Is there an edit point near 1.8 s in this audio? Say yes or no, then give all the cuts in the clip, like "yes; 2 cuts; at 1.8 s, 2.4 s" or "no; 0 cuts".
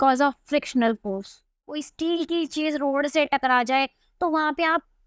yes; 1 cut; at 1.8 s